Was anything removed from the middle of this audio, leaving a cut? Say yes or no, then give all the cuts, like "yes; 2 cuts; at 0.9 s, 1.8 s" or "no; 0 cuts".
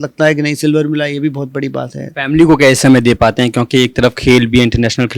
yes; 1 cut; at 2.0 s